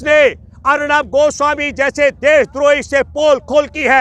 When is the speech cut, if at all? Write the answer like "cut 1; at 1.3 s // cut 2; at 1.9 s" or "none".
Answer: none